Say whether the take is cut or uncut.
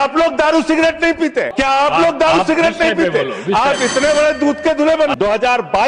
cut